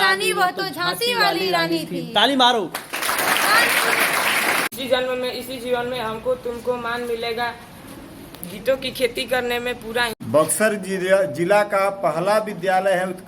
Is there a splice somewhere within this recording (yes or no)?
yes